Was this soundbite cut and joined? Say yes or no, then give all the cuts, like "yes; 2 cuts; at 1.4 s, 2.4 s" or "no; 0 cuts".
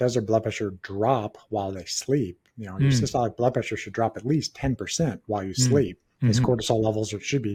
no; 0 cuts